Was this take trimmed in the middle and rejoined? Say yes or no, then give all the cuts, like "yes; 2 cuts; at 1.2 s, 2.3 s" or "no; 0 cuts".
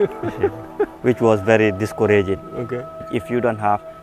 yes; 1 cut; at 3.1 s